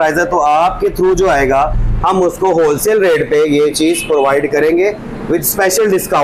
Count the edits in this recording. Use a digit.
0